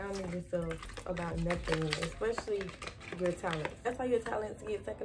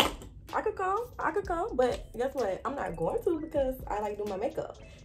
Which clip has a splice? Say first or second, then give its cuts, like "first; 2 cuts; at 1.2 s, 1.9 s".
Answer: first; 1 cut; at 3.9 s